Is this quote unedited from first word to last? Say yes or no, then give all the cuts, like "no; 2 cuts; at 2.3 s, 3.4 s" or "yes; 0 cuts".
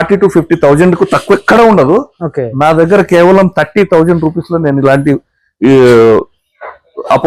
yes; 0 cuts